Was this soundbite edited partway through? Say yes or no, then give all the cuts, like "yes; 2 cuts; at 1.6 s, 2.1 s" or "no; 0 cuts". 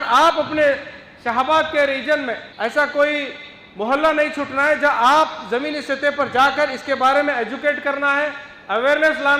yes; 1 cut; at 2.5 s